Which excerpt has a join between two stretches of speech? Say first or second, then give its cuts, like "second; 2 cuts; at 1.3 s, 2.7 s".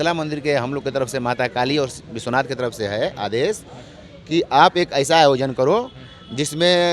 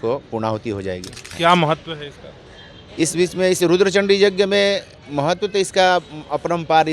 second; 1 cut; at 1.3 s